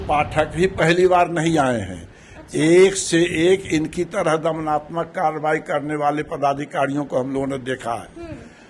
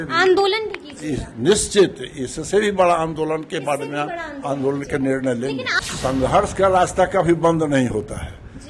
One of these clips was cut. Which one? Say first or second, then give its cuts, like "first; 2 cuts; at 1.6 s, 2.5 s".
second; 1 cut; at 5.7 s